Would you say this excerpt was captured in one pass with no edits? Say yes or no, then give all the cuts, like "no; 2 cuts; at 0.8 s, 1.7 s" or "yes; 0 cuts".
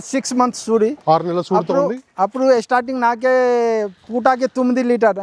yes; 0 cuts